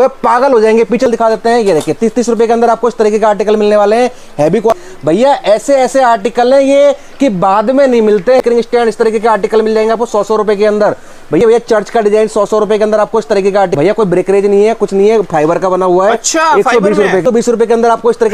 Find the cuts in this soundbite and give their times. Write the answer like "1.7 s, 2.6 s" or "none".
1.1 s, 4.7 s, 8.4 s, 11.4 s, 13.7 s, 17.2 s